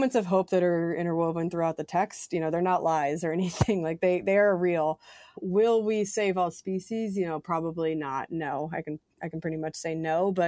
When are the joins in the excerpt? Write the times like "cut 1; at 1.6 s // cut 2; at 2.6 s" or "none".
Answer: none